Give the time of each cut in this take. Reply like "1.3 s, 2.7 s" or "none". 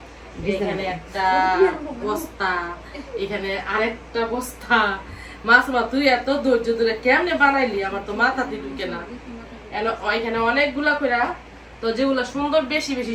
none

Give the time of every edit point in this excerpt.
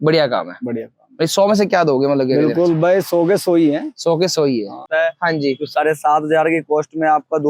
4.9 s

